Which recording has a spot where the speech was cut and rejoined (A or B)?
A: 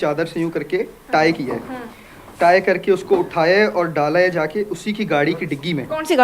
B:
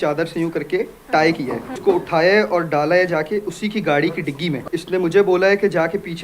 B